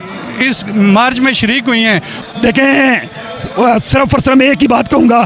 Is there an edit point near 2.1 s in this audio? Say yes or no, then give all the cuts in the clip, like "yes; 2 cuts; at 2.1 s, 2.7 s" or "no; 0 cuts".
yes; 1 cut; at 2.1 s